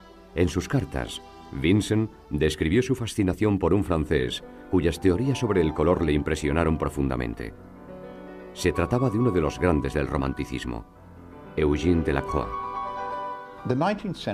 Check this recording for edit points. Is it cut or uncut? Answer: cut